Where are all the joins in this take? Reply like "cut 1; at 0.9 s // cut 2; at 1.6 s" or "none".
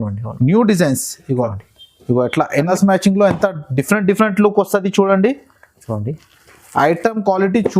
cut 1; at 2.5 s